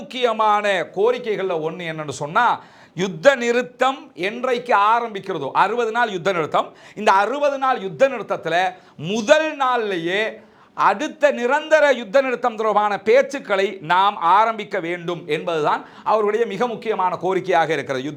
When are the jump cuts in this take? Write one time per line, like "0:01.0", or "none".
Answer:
none